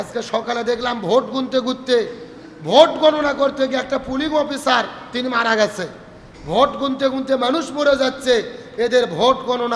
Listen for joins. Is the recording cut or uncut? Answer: uncut